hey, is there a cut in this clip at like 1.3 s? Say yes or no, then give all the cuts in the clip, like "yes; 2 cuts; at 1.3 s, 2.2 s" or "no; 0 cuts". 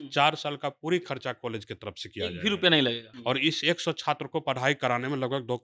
no; 1 cut; at 3.1 s